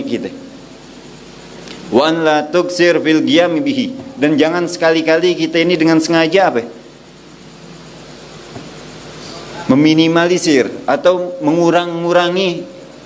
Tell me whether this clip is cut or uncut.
uncut